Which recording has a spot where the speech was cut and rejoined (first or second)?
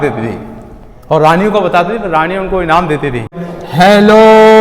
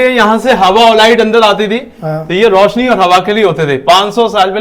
first